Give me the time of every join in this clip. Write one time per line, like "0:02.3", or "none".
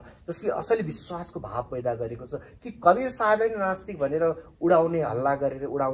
none